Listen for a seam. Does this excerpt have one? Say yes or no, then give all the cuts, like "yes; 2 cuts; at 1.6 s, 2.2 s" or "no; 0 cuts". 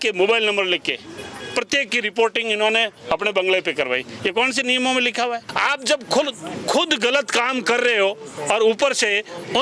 yes; 1 cut; at 5.5 s